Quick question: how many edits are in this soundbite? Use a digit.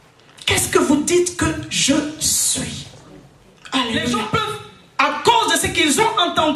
1